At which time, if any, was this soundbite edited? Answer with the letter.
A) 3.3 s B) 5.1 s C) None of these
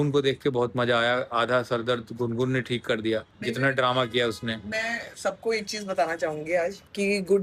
C